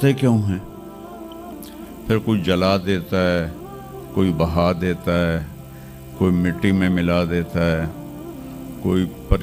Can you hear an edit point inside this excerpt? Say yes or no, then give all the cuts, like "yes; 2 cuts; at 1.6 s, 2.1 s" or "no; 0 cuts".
no; 0 cuts